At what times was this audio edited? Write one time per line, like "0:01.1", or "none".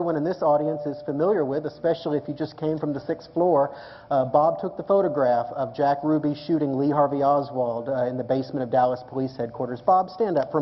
none